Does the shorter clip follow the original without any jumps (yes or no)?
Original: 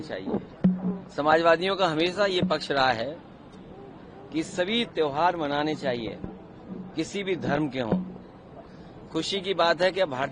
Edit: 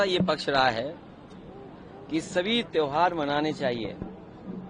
yes